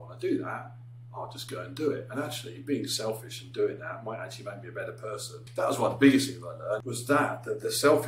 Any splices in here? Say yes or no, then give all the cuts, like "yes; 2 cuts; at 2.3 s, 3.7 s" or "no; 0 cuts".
yes; 2 cuts; at 5.4 s, 6.9 s